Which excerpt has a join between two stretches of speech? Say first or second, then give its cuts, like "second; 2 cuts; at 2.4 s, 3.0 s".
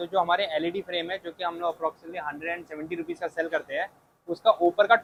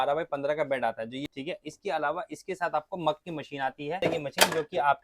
second; 2 cuts; at 1.2 s, 4.0 s